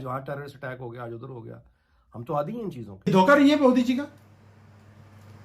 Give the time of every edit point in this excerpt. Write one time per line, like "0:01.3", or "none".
0:02.9